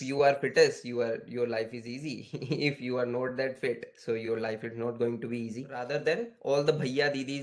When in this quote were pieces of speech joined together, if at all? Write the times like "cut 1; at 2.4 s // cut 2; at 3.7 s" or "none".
cut 1; at 5.7 s